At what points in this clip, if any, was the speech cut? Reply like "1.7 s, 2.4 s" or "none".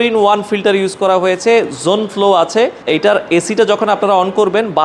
2.8 s